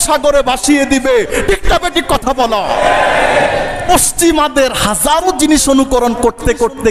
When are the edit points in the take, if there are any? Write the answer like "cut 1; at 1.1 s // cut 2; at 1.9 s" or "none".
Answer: cut 1; at 3.8 s

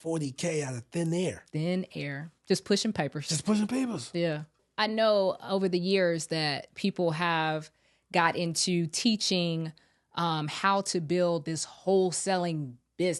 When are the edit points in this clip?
none

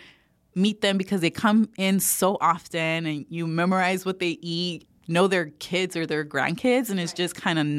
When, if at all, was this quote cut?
cut 1; at 4.8 s

